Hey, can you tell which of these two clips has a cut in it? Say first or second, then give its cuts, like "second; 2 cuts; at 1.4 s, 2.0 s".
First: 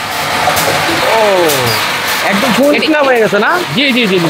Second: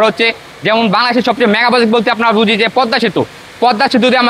first; 1 cut; at 1.0 s